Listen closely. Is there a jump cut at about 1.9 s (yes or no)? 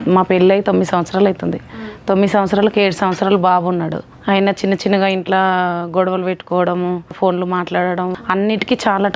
no